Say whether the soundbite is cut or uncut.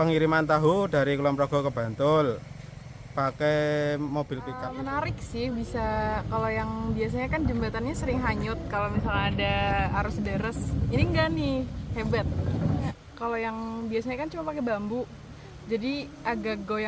cut